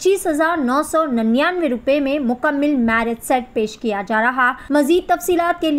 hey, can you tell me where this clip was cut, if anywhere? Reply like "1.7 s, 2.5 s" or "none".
4.6 s

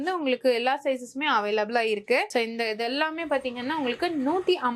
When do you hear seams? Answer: none

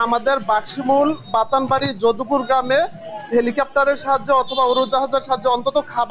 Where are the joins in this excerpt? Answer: none

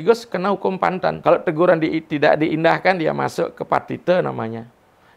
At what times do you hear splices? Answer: 1.2 s

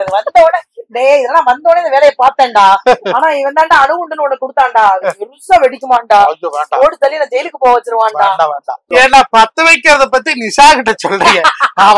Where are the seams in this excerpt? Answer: 8.9 s

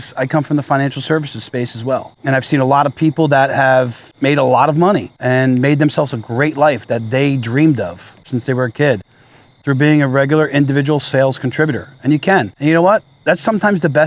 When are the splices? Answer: 2.1 s, 4.0 s, 5.1 s, 8.2 s, 12.5 s

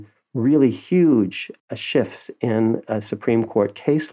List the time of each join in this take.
1.6 s

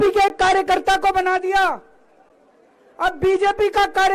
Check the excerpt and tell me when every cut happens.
none

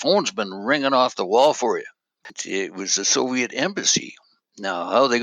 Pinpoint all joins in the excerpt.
2.3 s

